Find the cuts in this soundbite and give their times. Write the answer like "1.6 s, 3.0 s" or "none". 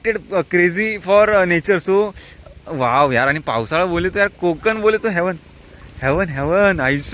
none